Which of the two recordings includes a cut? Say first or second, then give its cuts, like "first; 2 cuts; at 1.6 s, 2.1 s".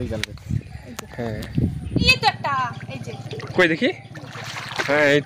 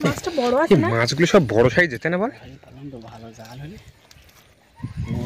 first; 1 cut; at 2.1 s